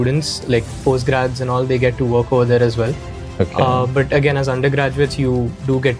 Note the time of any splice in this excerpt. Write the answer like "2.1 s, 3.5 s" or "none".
none